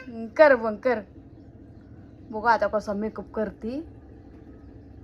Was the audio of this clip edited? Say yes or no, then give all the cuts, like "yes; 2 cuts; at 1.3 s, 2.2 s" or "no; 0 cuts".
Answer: no; 0 cuts